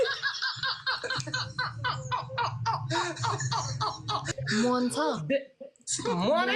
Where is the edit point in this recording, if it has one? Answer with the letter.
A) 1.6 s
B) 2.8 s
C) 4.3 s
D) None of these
C